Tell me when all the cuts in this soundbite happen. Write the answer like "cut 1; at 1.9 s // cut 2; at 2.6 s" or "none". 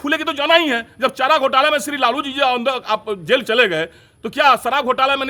none